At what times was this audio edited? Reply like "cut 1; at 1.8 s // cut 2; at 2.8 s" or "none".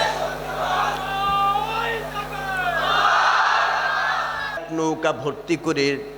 cut 1; at 4.6 s